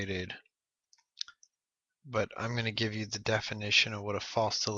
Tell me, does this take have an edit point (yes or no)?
no